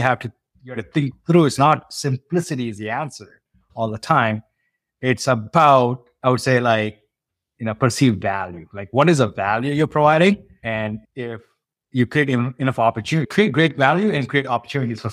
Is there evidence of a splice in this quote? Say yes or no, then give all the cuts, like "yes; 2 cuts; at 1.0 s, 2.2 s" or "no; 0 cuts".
yes; 1 cut; at 10.6 s